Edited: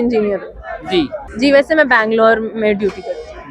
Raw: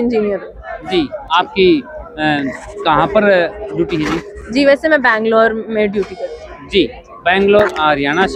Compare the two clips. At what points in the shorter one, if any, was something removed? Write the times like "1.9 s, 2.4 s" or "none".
1.2 s